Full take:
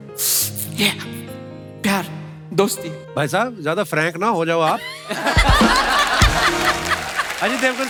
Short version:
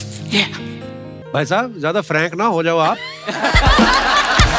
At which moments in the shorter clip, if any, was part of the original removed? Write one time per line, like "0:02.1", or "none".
0:01.2